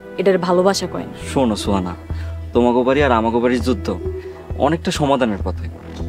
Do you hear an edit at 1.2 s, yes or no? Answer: yes